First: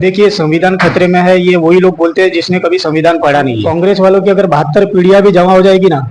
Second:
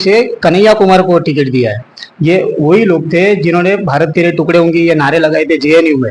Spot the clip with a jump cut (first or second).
first